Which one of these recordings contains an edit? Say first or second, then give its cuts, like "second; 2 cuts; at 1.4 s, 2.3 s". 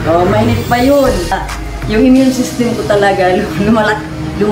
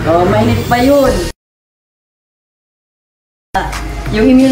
first; 1 cut; at 1.3 s